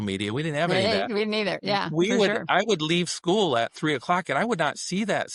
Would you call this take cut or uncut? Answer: uncut